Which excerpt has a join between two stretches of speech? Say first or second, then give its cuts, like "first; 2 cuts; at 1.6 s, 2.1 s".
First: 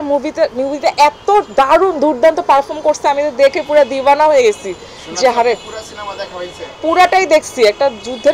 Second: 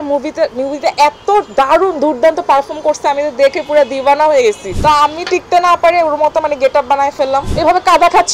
second; 2 cuts; at 4.7 s, 7.5 s